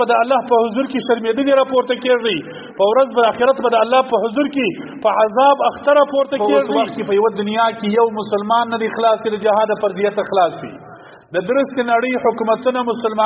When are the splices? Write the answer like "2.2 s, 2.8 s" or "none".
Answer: 6.6 s

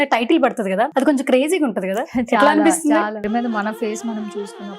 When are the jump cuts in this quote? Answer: 0.9 s, 3.2 s

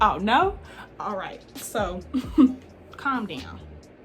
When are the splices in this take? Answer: none

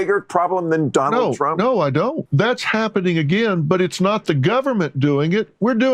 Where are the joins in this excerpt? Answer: 2.2 s

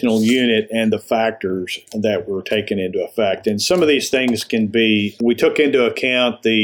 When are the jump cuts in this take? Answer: 5.1 s

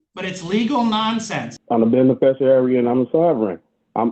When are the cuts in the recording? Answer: 1.5 s

